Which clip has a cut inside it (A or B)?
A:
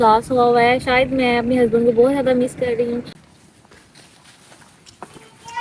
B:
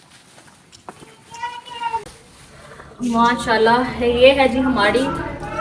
A